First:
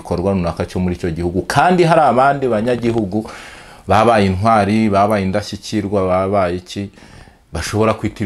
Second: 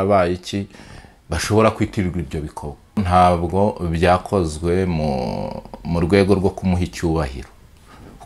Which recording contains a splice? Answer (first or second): second